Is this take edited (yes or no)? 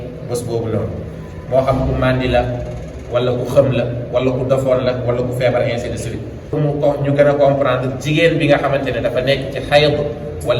yes